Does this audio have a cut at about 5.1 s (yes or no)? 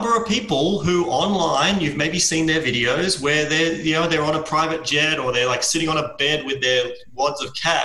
no